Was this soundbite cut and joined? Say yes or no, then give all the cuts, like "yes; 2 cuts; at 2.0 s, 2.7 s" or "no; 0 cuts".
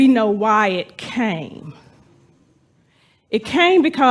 no; 0 cuts